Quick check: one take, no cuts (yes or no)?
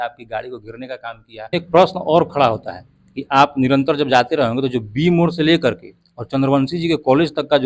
no